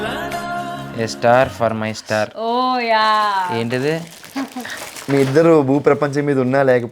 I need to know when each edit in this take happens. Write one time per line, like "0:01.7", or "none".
0:01.2